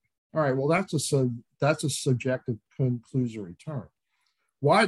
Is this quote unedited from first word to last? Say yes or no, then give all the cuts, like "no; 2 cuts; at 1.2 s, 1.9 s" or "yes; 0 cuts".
yes; 0 cuts